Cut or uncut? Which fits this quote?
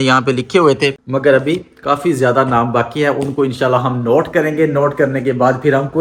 uncut